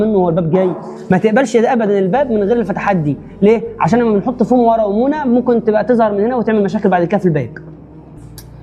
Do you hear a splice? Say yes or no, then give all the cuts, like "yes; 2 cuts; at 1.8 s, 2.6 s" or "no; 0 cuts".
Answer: no; 0 cuts